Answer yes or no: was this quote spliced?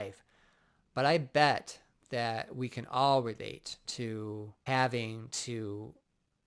yes